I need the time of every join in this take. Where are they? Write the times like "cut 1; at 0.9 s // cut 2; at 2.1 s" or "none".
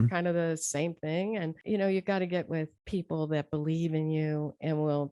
cut 1; at 1.6 s // cut 2; at 2.8 s